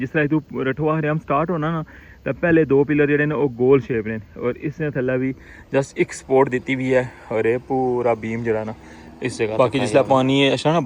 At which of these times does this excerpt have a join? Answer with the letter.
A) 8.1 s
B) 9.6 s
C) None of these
B